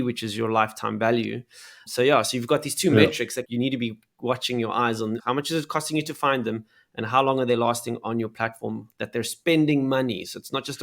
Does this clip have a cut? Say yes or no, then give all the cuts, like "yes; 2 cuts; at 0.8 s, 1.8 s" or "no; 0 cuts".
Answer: yes; 3 cuts; at 1.8 s, 3.4 s, 5.2 s